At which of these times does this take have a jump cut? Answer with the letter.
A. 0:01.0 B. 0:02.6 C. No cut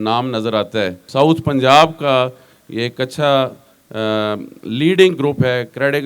A